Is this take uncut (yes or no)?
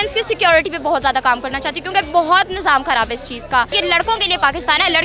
no